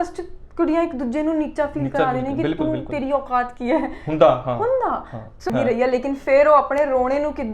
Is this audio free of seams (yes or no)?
no